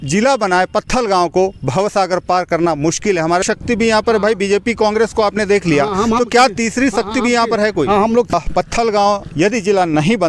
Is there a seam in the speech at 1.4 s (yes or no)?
no